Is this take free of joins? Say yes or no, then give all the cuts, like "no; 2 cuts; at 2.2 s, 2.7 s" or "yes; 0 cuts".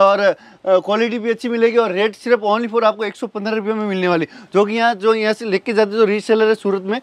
yes; 0 cuts